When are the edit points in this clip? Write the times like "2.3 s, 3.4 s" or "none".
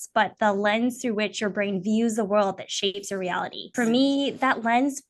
3.6 s